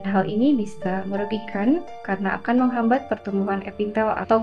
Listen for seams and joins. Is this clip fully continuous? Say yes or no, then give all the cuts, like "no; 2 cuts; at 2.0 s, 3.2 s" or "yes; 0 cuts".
yes; 0 cuts